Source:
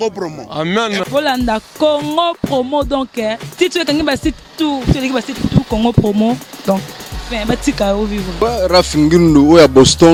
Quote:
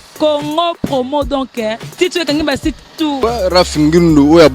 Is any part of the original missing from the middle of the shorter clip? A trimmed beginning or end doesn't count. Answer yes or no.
yes